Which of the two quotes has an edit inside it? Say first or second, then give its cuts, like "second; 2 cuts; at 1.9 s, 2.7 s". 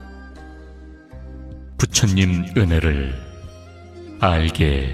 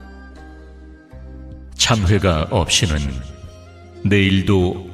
second; 1 cut; at 1.8 s